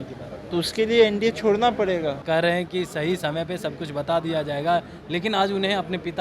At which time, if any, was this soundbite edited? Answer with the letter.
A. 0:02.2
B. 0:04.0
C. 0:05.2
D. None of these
A